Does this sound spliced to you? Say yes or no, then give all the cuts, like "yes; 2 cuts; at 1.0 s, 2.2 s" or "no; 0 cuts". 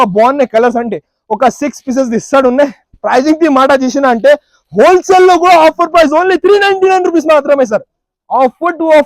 no; 0 cuts